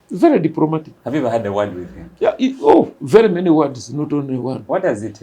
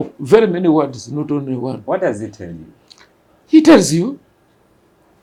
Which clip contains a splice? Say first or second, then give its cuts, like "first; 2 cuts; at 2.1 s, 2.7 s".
first; 1 cut; at 0.9 s